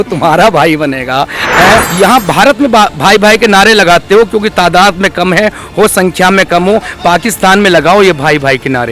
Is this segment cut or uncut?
cut